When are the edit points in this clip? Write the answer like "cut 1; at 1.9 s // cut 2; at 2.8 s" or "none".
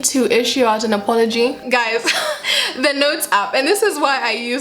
cut 1; at 1.6 s // cut 2; at 2.5 s